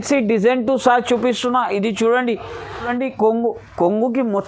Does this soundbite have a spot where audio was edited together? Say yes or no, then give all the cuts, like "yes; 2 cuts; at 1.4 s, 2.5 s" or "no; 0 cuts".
yes; 1 cut; at 2.9 s